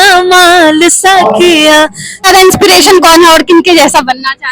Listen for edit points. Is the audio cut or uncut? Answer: cut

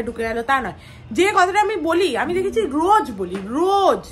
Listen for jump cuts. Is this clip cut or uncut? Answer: uncut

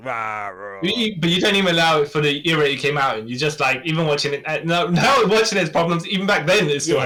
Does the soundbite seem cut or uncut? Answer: uncut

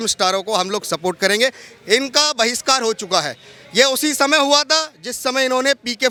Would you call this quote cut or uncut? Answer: uncut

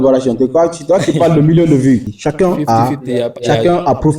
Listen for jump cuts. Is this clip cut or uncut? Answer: cut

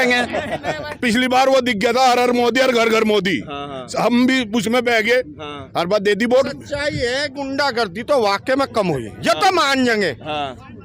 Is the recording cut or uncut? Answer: cut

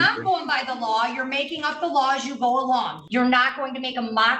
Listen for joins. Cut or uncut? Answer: cut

